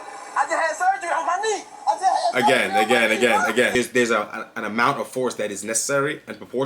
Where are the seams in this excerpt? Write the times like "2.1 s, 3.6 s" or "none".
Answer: 3.7 s